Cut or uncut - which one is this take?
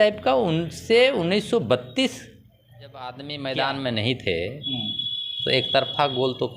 cut